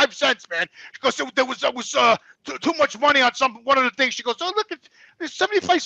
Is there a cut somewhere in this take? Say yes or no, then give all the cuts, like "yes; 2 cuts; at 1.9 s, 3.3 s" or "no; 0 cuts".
no; 0 cuts